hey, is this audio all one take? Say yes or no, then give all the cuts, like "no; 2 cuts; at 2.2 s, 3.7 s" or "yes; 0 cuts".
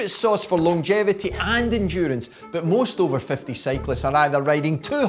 yes; 0 cuts